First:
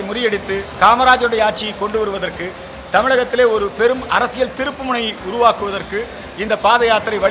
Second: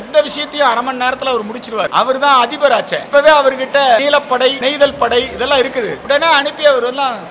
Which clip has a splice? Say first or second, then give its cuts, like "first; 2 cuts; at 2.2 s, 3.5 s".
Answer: second; 4 cuts; at 1.9 s, 3.0 s, 4.6 s, 6.0 s